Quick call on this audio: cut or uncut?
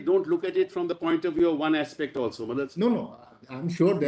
uncut